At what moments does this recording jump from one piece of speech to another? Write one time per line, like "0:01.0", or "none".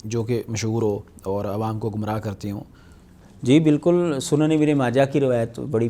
none